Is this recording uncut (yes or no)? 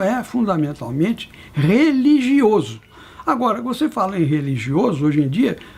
yes